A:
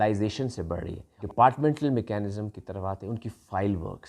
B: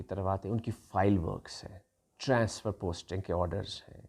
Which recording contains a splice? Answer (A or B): A